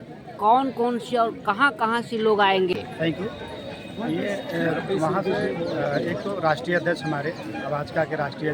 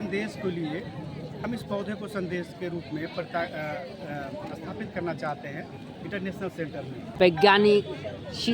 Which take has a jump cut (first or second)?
second